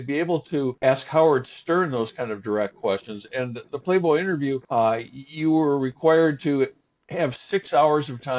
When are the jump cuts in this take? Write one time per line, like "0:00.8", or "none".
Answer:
none